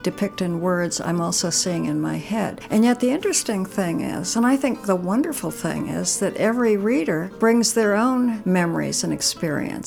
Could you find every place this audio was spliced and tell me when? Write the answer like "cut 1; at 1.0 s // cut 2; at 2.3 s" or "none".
cut 1; at 2.6 s // cut 2; at 4.8 s // cut 3; at 7.3 s // cut 4; at 8.4 s